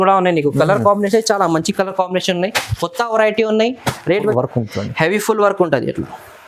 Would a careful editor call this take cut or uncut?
cut